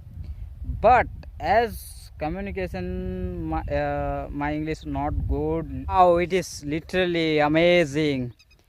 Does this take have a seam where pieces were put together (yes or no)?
yes